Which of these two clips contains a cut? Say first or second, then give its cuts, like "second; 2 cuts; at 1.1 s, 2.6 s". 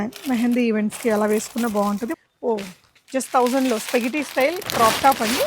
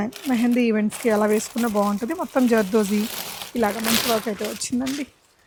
first; 1 cut; at 2.2 s